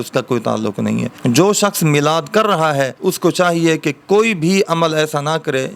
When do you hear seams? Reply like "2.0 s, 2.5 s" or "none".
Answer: 1.1 s, 2.9 s